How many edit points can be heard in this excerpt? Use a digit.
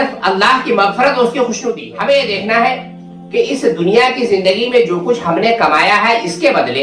1